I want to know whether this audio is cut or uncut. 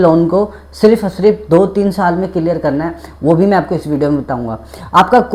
uncut